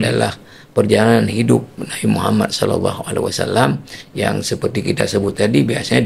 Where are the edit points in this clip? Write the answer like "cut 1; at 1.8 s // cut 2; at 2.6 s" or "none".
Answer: none